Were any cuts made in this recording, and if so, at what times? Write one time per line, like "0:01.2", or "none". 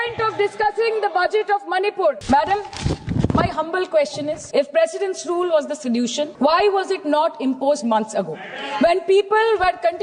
0:02.2
0:04.4
0:06.3